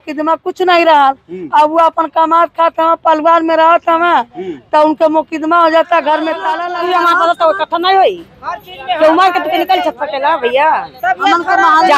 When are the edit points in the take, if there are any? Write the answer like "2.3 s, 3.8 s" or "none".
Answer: 6.6 s